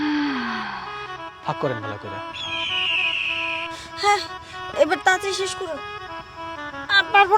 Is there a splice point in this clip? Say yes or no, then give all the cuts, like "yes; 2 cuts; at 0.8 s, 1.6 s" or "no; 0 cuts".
yes; 1 cut; at 0.9 s